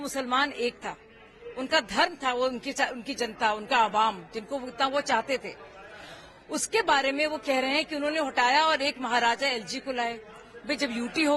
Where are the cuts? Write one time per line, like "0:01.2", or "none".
none